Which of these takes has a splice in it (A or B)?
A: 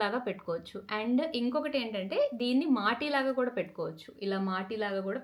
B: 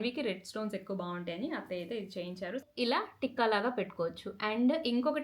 B